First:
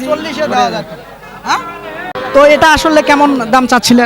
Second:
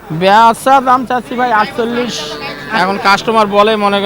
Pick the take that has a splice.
first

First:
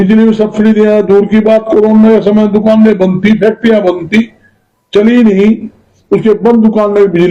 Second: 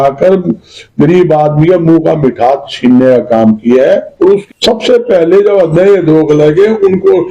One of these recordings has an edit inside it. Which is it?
second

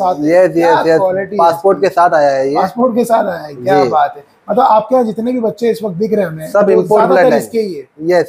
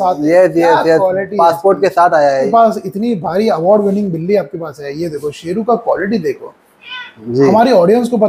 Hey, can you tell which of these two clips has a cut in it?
second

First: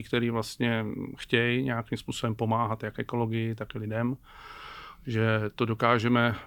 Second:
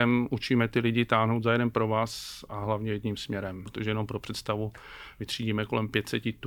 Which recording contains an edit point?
second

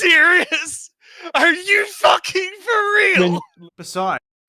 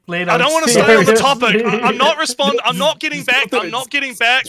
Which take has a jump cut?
first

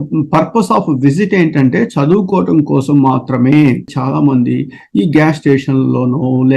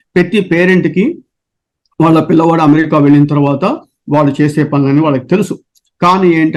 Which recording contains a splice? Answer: first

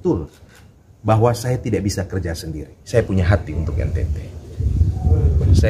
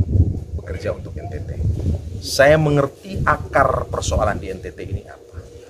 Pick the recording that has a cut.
first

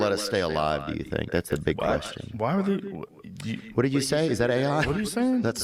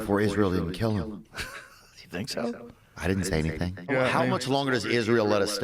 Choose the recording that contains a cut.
second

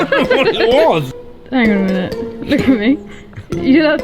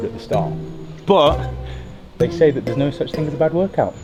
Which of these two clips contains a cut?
first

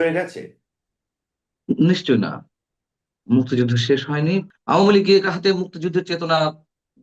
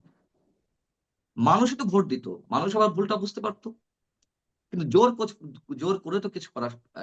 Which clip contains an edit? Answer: first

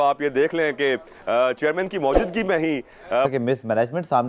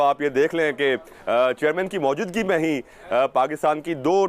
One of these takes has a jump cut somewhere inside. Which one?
first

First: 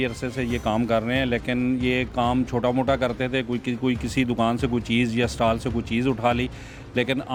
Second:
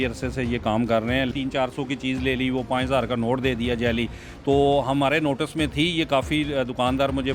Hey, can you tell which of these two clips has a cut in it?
second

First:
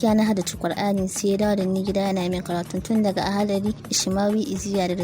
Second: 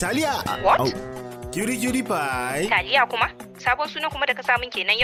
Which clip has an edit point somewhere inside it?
first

